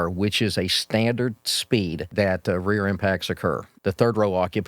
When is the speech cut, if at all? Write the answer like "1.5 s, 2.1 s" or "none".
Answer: 2.0 s, 3.7 s